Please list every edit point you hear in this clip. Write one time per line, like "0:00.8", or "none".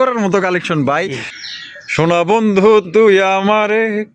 0:01.3